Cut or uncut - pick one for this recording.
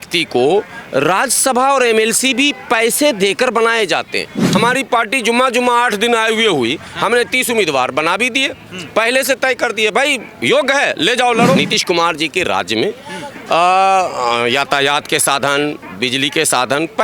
cut